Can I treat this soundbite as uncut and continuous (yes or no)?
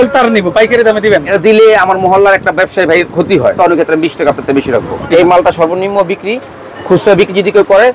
no